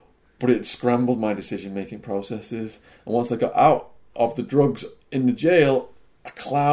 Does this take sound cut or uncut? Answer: uncut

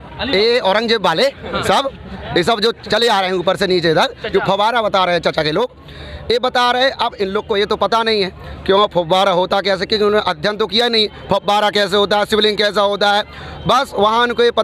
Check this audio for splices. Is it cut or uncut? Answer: uncut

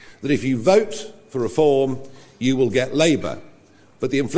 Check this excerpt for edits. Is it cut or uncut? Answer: uncut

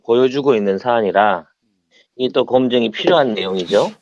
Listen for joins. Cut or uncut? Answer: uncut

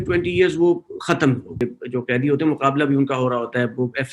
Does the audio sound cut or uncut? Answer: cut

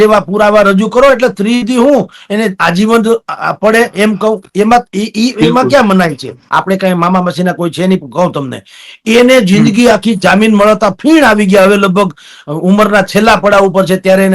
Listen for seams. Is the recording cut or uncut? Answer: cut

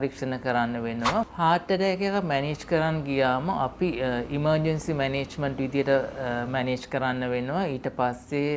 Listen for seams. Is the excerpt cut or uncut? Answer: cut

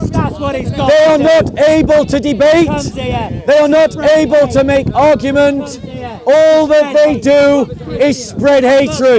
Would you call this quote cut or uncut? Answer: uncut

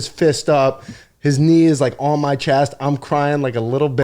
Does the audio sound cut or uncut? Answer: uncut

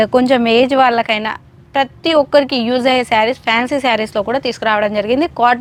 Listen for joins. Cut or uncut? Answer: uncut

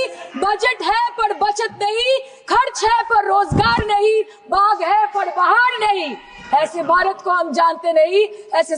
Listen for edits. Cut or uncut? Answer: uncut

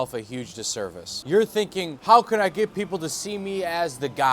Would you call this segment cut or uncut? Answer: cut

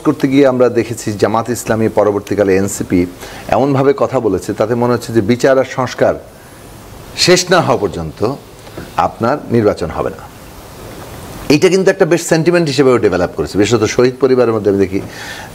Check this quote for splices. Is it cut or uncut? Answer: uncut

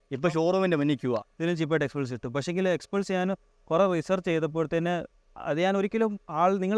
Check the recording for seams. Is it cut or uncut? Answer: cut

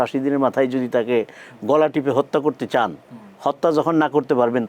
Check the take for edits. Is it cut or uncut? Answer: uncut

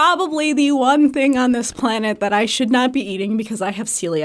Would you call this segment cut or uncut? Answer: uncut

